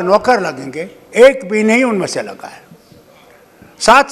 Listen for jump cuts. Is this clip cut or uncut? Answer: uncut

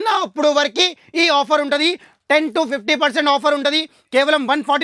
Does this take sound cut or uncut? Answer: uncut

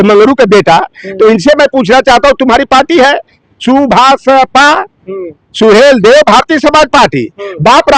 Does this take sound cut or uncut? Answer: uncut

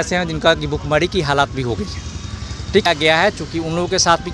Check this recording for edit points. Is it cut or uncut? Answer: cut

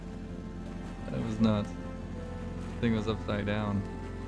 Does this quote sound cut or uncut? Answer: uncut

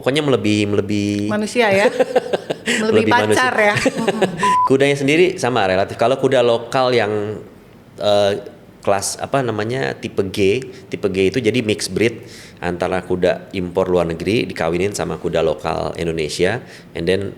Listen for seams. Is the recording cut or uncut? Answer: cut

